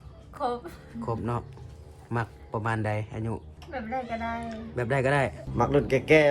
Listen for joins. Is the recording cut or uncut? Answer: cut